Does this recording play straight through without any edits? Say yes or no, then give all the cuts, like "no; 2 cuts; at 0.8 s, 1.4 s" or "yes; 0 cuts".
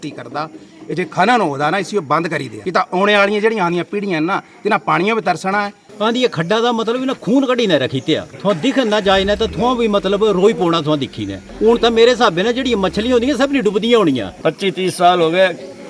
no; 5 cuts; at 2.5 s, 5.8 s, 8.3 s, 11.5 s, 14.3 s